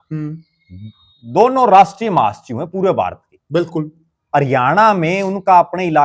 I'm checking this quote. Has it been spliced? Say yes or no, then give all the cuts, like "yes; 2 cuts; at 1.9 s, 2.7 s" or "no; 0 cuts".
no; 0 cuts